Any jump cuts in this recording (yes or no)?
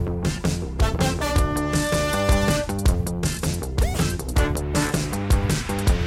yes